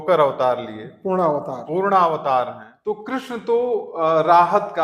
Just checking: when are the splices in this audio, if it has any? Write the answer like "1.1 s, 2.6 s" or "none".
2.6 s